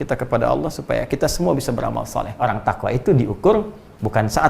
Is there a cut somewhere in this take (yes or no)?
yes